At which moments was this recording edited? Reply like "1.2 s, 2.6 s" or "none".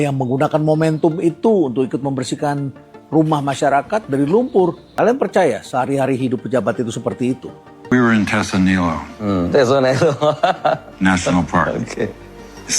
4.8 s, 7.9 s